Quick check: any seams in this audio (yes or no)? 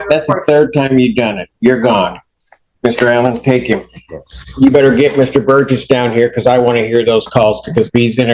no